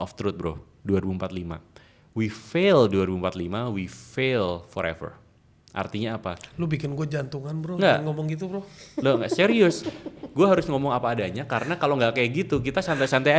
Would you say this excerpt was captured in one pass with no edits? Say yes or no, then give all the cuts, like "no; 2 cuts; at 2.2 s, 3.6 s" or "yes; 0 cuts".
yes; 0 cuts